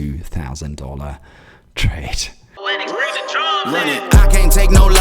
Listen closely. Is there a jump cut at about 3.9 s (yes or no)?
no